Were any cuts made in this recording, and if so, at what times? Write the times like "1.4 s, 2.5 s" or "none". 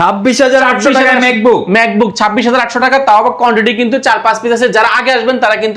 none

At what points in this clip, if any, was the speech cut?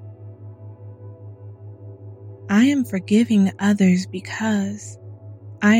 none

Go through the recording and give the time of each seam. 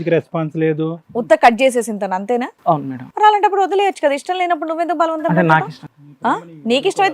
1.0 s

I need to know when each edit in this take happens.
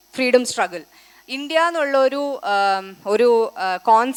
none

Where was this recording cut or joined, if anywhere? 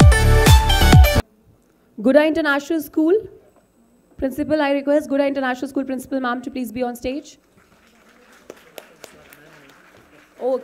1.2 s

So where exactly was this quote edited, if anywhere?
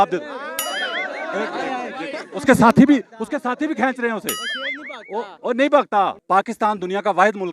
6.2 s

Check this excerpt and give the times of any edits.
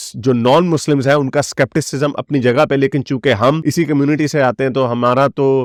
none

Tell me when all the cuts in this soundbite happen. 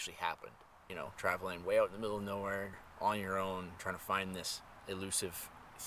0.9 s, 2.8 s, 4.7 s

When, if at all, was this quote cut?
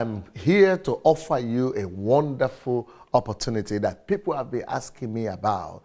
none

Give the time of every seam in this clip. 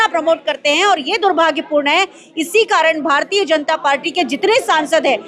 none

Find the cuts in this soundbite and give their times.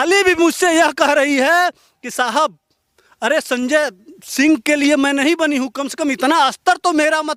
none

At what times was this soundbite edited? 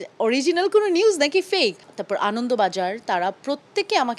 1.9 s

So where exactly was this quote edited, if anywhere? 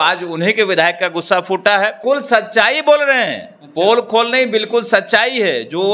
2.0 s

